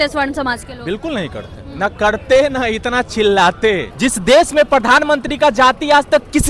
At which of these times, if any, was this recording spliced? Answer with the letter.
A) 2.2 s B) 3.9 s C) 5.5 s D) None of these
B